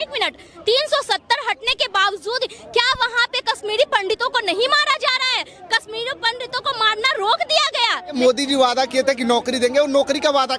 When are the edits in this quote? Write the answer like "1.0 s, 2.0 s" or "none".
8.1 s